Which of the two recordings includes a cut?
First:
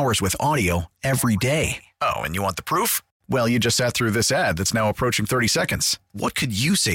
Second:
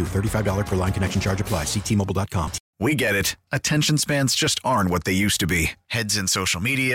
second; 1 cut; at 2.6 s

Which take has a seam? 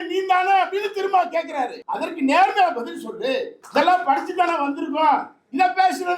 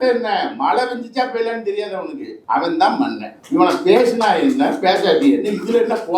first; 1 cut; at 3.5 s

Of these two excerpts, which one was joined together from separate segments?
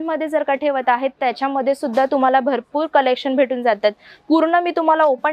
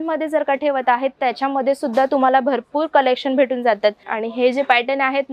second; 1 cut; at 4.1 s

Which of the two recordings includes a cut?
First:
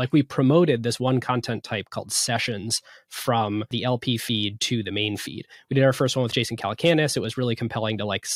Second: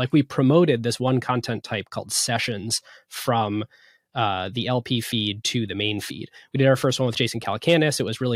first; 1 cut; at 3.7 s

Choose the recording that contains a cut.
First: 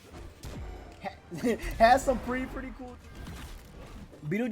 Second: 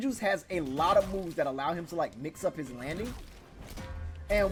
first; 1 cut; at 2.7 s

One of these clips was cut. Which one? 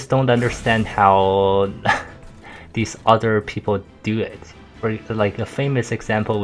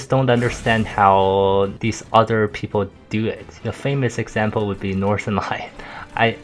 second; 2 cuts; at 1.8 s, 3.7 s

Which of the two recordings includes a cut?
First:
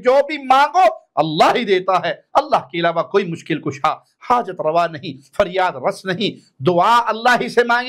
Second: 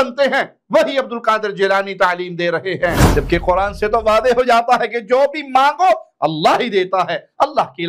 second; 1 cut; at 3.0 s

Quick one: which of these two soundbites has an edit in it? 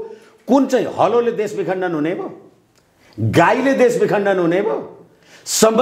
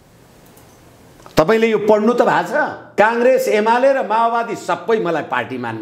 second; 1 cut; at 2.9 s

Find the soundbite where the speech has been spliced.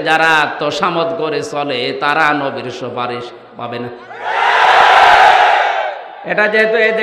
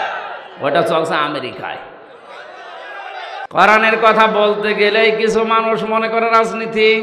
second; 1 cut; at 3.5 s

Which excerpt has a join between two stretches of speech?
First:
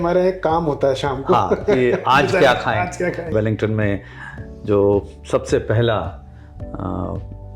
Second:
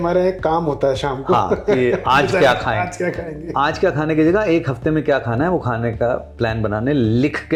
first; 1 cut; at 3.3 s

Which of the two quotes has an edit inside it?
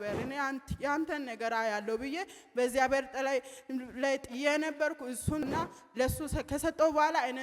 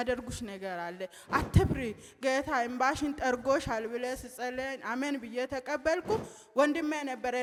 first; 1 cut; at 5.4 s

